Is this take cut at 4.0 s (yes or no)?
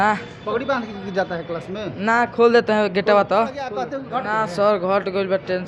yes